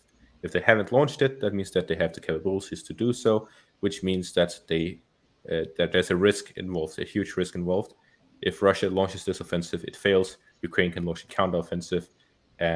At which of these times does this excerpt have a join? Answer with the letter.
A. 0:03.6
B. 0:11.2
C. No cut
C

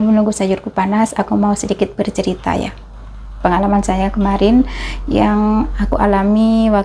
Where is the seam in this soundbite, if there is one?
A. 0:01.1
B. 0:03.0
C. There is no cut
C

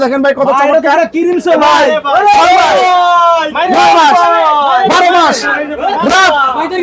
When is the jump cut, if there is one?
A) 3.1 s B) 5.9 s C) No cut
C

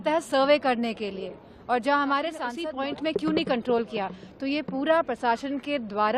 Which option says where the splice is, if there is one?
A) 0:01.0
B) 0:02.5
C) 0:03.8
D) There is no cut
B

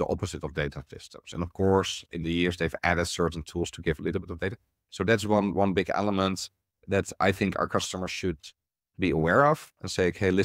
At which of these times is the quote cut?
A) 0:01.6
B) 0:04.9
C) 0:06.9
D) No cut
D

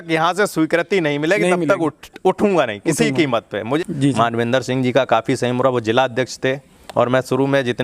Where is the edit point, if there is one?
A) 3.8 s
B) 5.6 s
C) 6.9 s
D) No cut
A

